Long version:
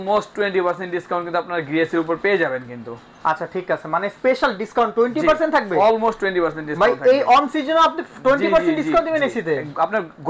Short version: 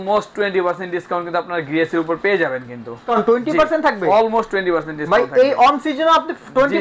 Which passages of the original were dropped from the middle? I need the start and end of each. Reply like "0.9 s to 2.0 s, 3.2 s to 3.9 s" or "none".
3.0 s to 4.7 s